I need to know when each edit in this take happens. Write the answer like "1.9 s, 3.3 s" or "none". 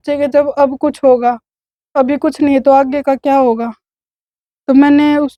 none